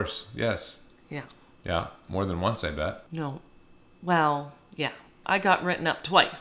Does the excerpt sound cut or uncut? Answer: cut